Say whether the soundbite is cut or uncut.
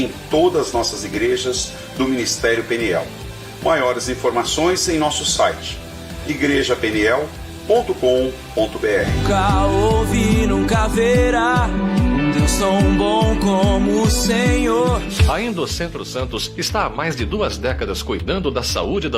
cut